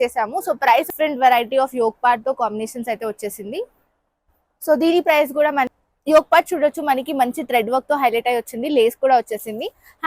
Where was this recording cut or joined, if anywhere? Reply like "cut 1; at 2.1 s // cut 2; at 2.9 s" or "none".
cut 1; at 0.9 s // cut 2; at 5.7 s